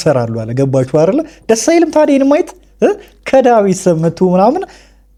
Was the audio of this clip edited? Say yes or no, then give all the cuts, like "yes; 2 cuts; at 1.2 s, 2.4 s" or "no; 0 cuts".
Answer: no; 0 cuts